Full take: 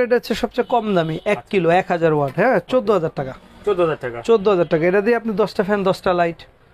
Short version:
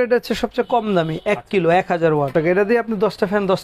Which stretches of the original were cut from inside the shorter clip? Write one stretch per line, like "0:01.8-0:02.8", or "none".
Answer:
0:02.3-0:04.7